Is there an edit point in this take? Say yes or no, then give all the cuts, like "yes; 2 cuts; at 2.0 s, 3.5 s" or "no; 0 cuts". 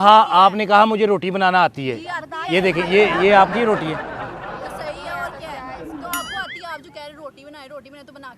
no; 0 cuts